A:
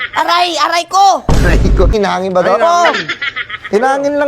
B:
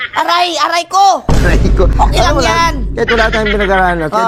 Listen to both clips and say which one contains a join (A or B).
A